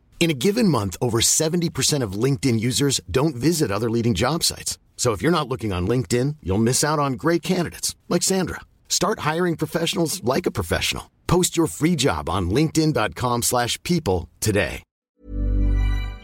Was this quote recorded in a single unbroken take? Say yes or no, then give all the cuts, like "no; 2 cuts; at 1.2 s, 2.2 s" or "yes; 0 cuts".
no; 1 cut; at 15.1 s